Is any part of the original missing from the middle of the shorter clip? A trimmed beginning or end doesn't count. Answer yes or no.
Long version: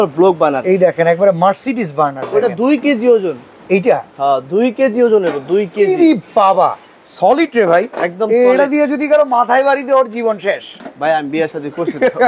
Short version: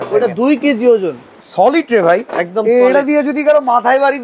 yes